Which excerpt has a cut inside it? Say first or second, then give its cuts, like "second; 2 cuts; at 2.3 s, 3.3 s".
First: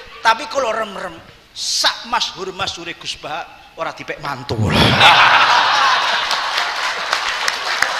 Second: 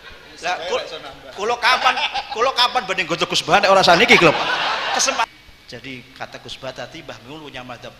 second; 1 cut; at 5.2 s